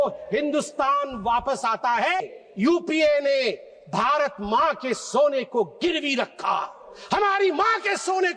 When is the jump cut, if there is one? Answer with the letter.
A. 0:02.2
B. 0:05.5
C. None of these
A